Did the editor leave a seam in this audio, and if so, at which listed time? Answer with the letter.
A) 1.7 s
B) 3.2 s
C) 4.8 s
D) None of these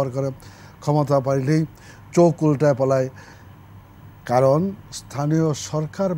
B